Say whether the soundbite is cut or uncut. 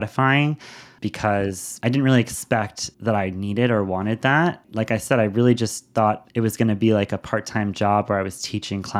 uncut